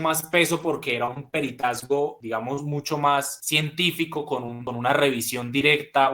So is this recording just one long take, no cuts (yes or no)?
no